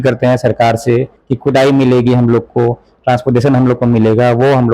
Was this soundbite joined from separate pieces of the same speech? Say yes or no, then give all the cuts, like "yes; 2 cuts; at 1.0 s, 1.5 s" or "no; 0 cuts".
yes; 1 cut; at 1.2 s